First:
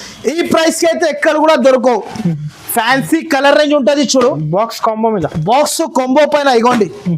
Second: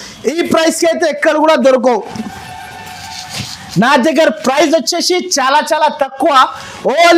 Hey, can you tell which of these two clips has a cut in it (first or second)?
first